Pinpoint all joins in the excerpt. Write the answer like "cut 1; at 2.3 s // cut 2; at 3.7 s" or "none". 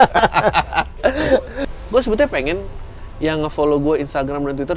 cut 1; at 1.5 s

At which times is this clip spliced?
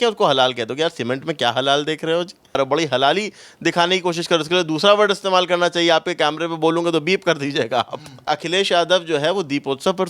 cut 1; at 2.6 s // cut 2; at 8.3 s

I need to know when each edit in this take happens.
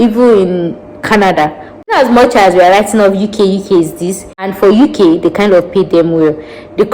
cut 1; at 1.9 s // cut 2; at 4.5 s

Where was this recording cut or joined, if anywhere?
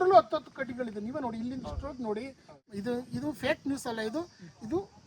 cut 1; at 2.5 s

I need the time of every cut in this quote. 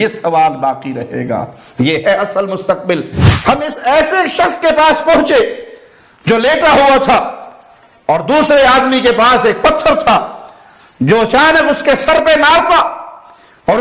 cut 1; at 3.1 s

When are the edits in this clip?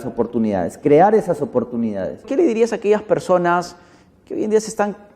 cut 1; at 2.3 s

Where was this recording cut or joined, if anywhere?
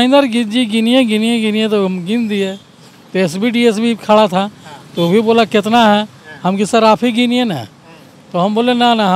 none

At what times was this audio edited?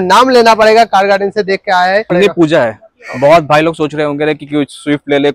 cut 1; at 2.1 s

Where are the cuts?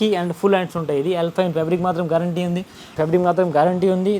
cut 1; at 3.0 s

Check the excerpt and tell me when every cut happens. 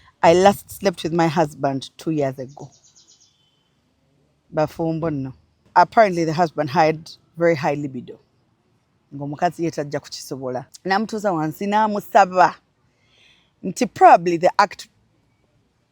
cut 1; at 5.7 s // cut 2; at 10.7 s

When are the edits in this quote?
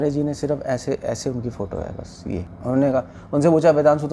cut 1; at 2.5 s

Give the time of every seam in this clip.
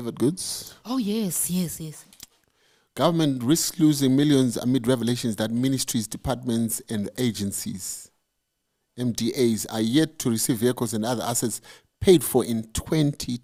none

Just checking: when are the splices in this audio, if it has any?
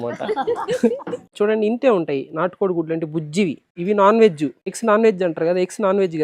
cut 1; at 1.3 s // cut 2; at 3.7 s // cut 3; at 4.7 s

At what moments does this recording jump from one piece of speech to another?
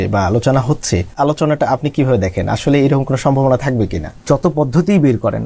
cut 1; at 1.1 s // cut 2; at 4.1 s

